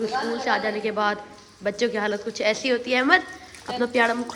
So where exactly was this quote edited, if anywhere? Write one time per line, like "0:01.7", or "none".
none